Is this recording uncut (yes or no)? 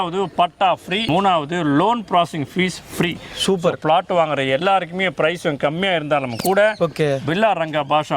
no